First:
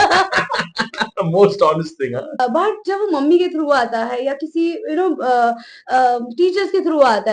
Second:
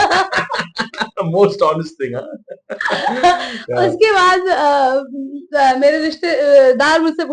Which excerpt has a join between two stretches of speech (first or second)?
first